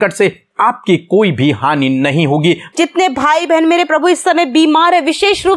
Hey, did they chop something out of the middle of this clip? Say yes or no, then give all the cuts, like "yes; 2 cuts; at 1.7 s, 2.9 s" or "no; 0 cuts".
yes; 1 cut; at 2.7 s